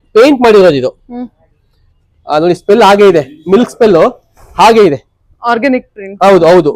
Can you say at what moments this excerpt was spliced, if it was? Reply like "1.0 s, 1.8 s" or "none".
none